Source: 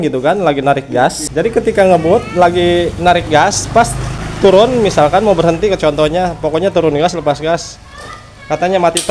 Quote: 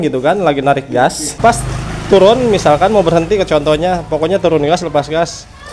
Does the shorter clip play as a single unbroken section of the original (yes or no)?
no